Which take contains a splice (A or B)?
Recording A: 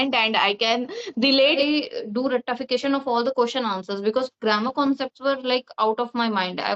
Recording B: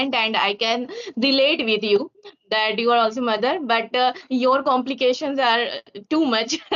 A